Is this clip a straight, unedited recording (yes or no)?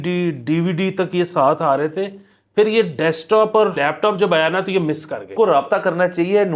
no